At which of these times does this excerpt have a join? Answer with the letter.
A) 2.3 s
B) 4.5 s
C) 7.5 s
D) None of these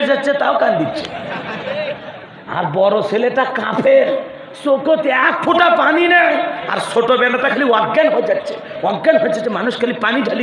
A